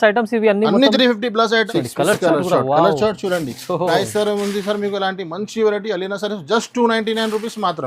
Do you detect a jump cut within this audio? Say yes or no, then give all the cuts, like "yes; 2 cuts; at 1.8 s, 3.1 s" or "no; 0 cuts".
yes; 1 cut; at 1.7 s